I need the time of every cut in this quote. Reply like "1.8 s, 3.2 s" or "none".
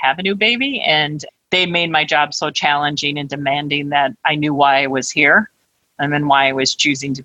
none